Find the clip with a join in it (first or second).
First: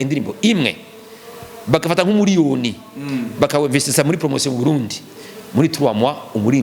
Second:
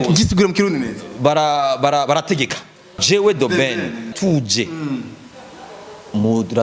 second